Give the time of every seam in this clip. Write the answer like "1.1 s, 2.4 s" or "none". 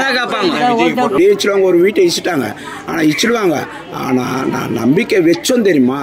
1.1 s